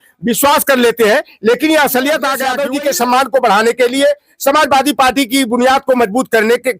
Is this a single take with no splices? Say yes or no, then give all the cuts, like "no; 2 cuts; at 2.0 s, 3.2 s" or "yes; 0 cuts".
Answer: no; 1 cut; at 2.5 s